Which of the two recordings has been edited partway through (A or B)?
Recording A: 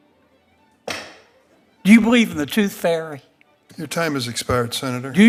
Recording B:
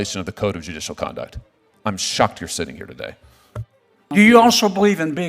B